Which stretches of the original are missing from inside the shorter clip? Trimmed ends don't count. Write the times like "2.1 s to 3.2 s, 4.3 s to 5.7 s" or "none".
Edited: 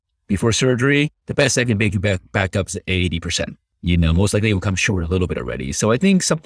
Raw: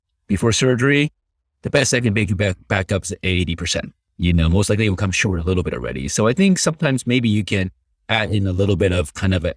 1.2 s to 1.6 s